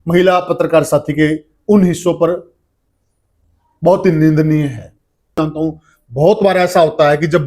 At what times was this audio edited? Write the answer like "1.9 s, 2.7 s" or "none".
5.4 s